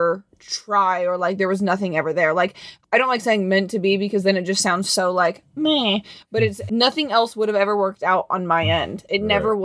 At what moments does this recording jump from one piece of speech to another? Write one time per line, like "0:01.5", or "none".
0:02.7
0:06.6